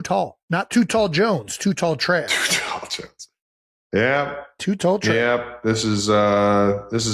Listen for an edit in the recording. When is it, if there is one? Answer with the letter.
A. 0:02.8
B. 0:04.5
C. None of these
C